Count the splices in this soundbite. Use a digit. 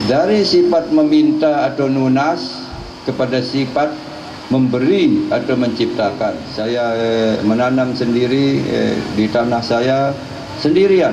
1